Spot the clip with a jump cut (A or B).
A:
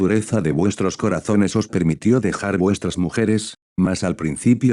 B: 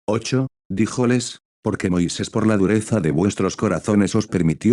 A